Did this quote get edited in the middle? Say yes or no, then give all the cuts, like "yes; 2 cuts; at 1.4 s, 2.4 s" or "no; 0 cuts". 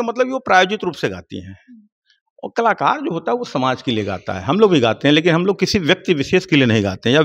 no; 0 cuts